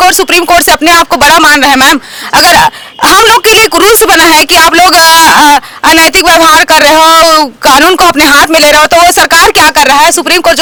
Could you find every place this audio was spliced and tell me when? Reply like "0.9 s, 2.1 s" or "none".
none